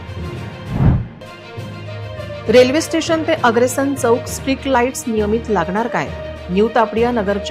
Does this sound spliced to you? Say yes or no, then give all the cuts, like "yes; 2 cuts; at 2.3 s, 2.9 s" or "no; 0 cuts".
no; 0 cuts